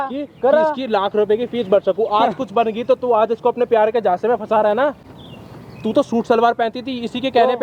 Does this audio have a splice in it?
no; 0 cuts

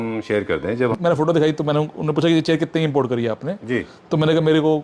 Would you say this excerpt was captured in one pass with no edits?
no; 1 cut; at 1.0 s

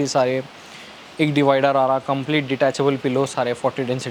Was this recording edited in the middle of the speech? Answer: no; 0 cuts

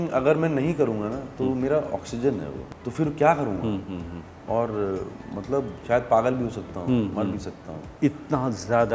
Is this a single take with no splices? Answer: no; 3 cuts; at 2.6 s, 4.4 s, 5.8 s

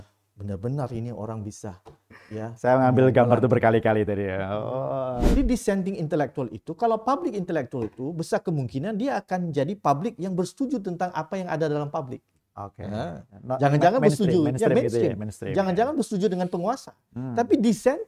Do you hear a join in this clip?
yes; 1 cut; at 5.4 s

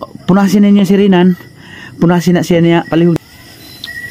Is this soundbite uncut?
no; 1 cut; at 3.1 s

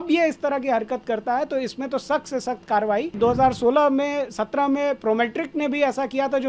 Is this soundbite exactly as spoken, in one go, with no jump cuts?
no; 1 cut; at 3.1 s

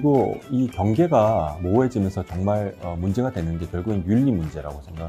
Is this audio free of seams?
yes; 0 cuts

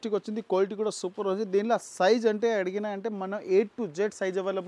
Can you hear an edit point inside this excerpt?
no; 0 cuts

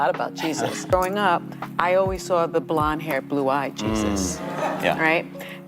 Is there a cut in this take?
yes; 1 cut; at 0.9 s

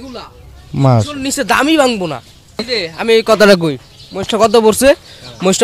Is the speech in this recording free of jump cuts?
no; 1 cut; at 2.7 s

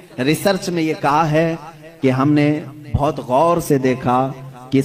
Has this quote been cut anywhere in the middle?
no; 0 cuts

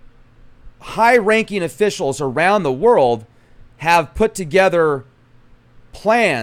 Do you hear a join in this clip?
no; 0 cuts

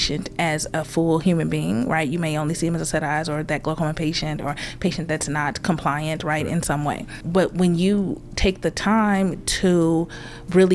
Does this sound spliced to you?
yes; 1 cut; at 7.2 s

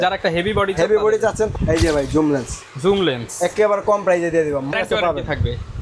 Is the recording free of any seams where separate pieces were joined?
no; 2 cuts; at 1.5 s, 4.7 s

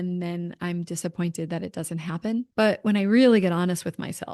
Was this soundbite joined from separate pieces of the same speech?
yes; 1 cut; at 2.5 s

